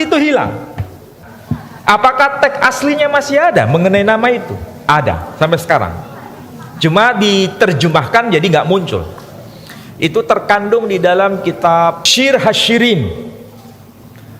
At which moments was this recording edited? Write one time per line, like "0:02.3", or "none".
0:01.3
0:12.1